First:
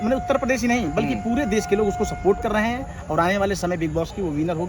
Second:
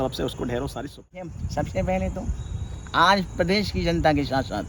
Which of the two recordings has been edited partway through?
second; 1 cut; at 1.3 s

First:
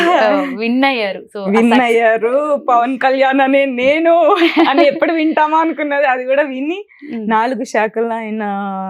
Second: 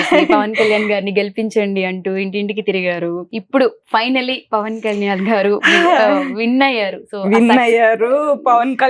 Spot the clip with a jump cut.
second; 1 cut; at 3.3 s

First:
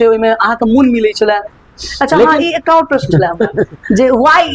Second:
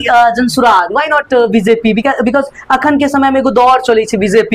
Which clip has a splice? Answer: first; 1 cut; at 1.6 s

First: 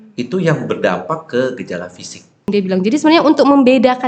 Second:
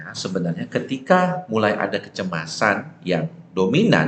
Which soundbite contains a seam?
first; 1 cut; at 2.5 s

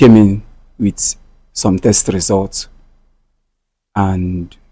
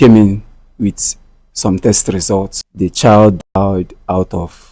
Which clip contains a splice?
second; 1 cut; at 2.6 s

